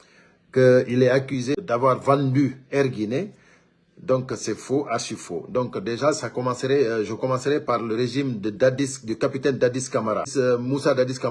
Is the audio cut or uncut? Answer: cut